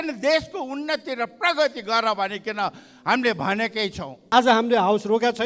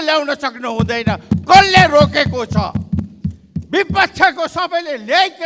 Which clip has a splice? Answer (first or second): first